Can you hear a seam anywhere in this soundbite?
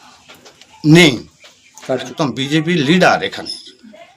yes; 1 cut; at 2.1 s

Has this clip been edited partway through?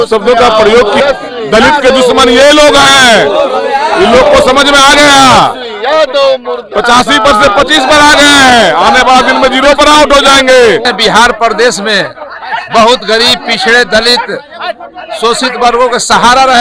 yes; 2 cuts; at 1.0 s, 10.8 s

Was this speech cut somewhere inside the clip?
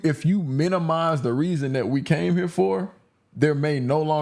no; 0 cuts

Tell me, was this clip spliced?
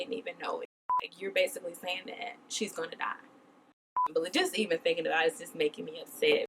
yes; 2 cuts; at 1.1 s, 4.0 s

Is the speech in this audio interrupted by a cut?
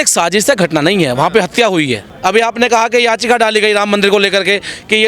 yes; 1 cut; at 2.1 s

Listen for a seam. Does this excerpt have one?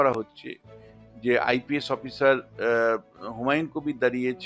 no; 0 cuts

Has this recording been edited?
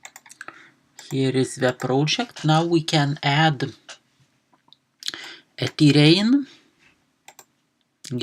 yes; 1 cut; at 3.6 s

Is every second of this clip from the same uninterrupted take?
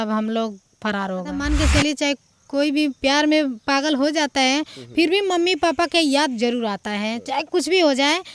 no; 1 cut; at 1.4 s

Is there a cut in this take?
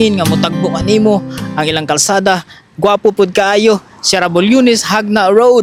no; 0 cuts

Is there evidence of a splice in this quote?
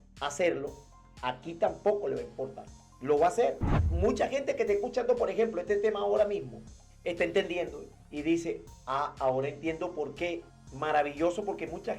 yes; 2 cuts; at 3.8 s, 10.5 s

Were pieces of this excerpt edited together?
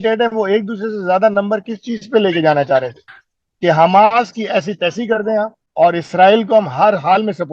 yes; 1 cut; at 5.6 s

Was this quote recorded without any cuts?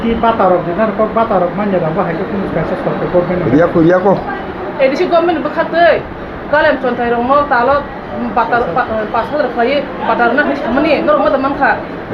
yes; 0 cuts

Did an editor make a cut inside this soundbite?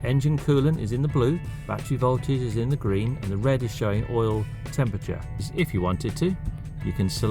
yes; 1 cut; at 5.5 s

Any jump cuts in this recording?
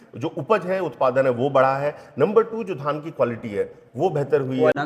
no; 0 cuts

